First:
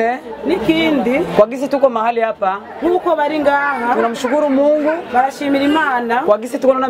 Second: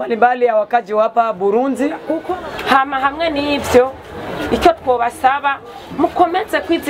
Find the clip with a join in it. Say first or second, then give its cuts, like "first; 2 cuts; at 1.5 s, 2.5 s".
second; 1 cut; at 2.2 s